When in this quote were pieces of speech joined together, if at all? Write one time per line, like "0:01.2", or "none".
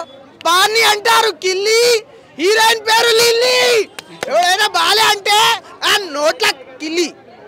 none